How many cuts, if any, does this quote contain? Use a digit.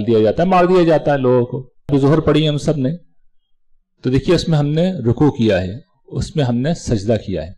1